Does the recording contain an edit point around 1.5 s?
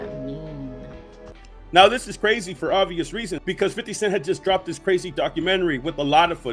yes; 1 cut; at 1.5 s

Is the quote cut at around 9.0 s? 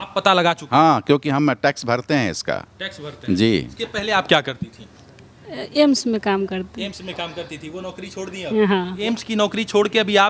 yes; 2 cuts; at 3.7 s, 9.0 s

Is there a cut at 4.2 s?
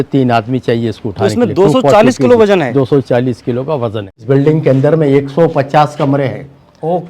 yes; 1 cut; at 4.2 s

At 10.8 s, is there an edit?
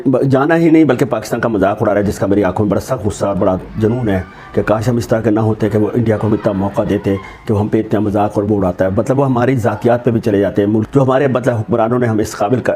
yes; 1 cut; at 10.8 s

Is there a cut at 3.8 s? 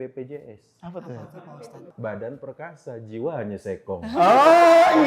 no; 1 cut; at 1.9 s

